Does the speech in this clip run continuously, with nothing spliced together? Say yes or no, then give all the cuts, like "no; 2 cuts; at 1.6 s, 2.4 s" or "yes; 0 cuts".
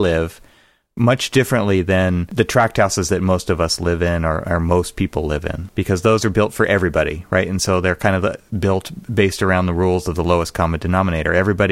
no; 2 cuts; at 2.3 s, 5.6 s